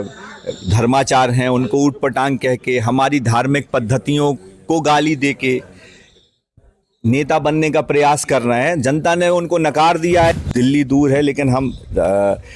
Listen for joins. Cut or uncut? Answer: cut